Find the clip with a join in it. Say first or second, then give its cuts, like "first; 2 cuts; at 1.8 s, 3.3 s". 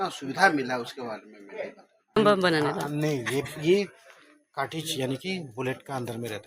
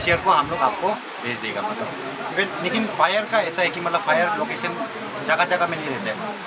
first; 1 cut; at 2.2 s